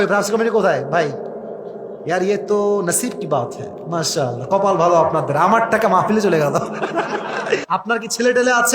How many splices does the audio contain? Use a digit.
1